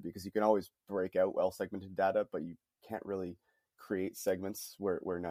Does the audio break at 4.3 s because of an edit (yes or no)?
no